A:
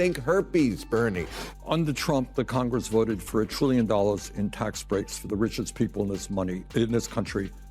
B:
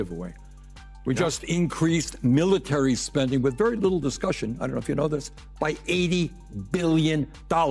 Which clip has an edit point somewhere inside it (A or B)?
A